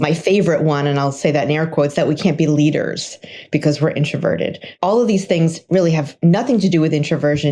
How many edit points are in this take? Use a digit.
1